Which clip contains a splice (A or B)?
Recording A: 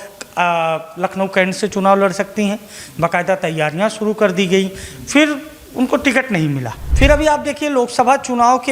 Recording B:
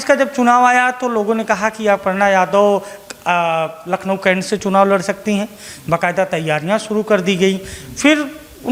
A